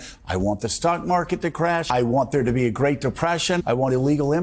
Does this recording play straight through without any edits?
no; 2 cuts; at 1.9 s, 3.6 s

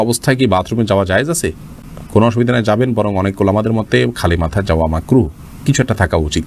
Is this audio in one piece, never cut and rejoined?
yes; 0 cuts

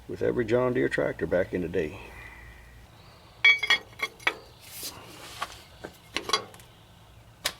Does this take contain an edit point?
no; 0 cuts

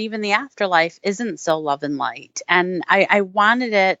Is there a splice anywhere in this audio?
no; 0 cuts

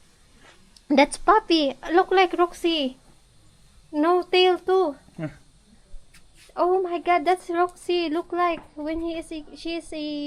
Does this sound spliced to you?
no; 0 cuts

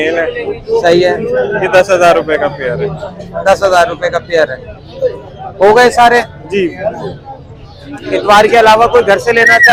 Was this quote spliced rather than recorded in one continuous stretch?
no; 0 cuts

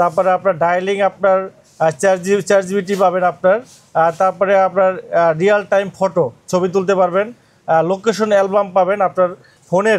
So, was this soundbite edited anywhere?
no; 0 cuts

